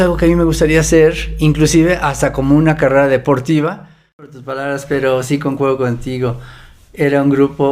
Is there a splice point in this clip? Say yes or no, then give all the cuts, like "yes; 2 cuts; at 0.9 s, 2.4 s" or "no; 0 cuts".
yes; 1 cut; at 4.4 s